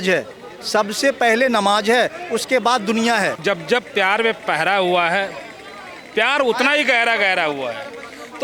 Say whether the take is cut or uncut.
cut